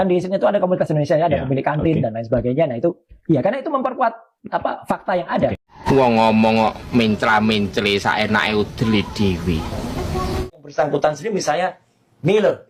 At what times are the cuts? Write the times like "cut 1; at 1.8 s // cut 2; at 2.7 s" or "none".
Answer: none